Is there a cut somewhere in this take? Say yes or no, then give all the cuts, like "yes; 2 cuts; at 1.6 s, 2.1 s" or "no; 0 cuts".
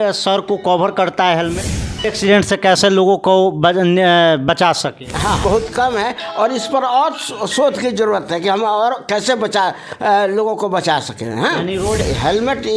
yes; 3 cuts; at 2.0 s, 5.4 s, 12.0 s